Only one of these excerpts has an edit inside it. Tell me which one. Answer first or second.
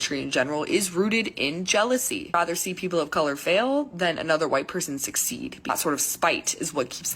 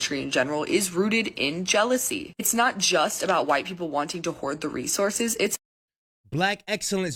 first